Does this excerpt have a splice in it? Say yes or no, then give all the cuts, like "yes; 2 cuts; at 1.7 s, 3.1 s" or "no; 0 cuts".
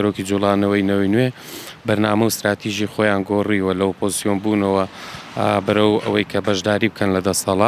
no; 0 cuts